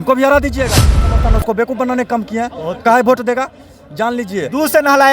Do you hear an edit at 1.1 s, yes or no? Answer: yes